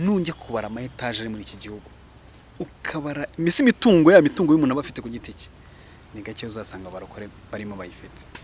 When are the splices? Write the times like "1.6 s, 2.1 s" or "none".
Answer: none